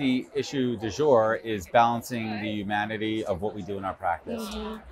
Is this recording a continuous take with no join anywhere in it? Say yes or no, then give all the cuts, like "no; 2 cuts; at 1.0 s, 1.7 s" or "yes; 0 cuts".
yes; 0 cuts